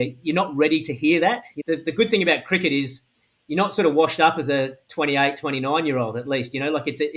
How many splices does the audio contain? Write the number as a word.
one